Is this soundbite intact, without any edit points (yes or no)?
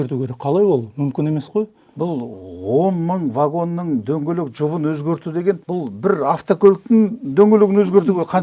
no